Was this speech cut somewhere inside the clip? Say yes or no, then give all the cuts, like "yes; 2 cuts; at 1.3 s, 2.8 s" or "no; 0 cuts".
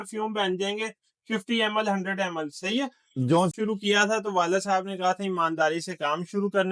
yes; 1 cut; at 3.5 s